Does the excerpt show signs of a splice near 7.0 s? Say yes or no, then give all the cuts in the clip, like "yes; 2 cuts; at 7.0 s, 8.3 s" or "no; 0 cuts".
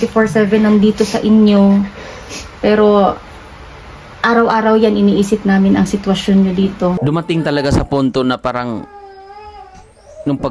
yes; 1 cut; at 7.0 s